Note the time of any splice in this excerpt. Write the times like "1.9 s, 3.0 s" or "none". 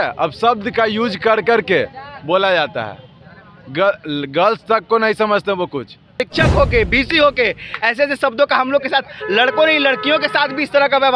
6.2 s